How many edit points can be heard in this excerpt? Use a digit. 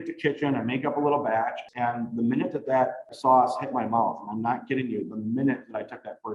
2